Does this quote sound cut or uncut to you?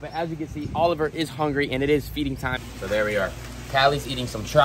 cut